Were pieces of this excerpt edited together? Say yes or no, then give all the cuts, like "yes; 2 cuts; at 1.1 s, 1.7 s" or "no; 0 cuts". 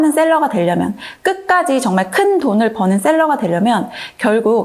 no; 0 cuts